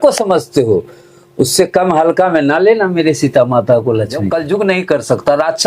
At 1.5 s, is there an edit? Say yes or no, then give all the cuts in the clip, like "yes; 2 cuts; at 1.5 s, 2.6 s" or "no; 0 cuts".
no; 1 cut; at 4.3 s